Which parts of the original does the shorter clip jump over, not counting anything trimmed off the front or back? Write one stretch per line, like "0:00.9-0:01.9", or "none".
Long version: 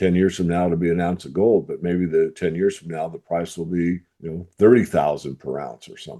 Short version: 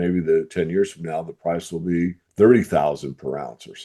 0:04.1-0:04.5